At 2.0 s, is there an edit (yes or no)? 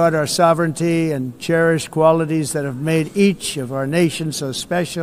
no